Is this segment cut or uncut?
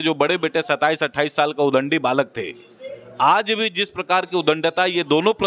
uncut